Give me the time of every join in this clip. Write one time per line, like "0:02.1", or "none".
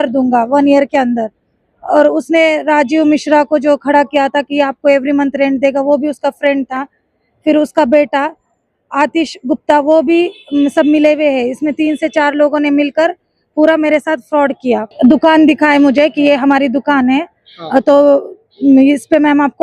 0:14.9